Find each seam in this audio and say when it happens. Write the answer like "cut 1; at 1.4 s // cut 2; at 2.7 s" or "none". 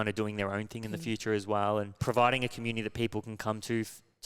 cut 1; at 2.0 s